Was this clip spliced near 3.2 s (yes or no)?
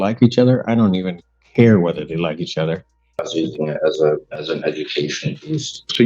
yes